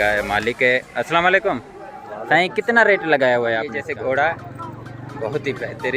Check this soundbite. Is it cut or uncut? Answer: cut